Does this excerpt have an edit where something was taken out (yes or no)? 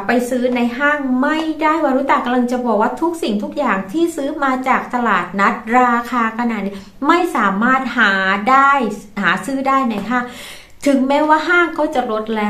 no